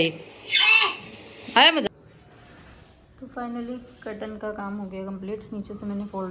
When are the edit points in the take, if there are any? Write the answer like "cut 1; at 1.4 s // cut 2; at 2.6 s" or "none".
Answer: cut 1; at 1.9 s